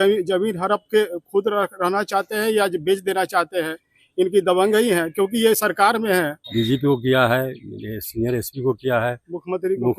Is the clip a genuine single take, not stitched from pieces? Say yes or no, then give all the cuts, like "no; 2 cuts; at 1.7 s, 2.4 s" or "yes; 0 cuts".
no; 1 cut; at 6.4 s